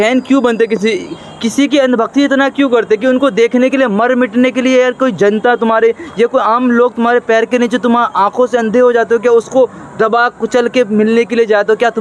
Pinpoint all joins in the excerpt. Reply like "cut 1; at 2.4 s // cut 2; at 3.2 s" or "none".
none